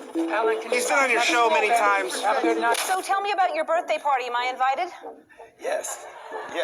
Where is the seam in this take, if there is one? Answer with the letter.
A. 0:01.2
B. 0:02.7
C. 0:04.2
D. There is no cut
B